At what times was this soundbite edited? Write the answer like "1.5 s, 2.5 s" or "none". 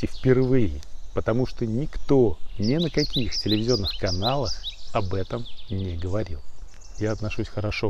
2.5 s, 6.8 s